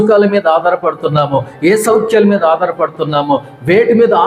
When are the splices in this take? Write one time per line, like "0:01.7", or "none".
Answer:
none